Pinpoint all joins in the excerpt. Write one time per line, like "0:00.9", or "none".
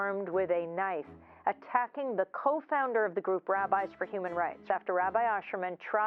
0:04.6